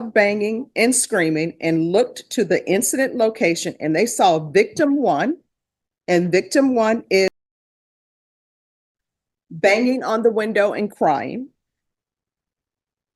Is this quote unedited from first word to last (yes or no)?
yes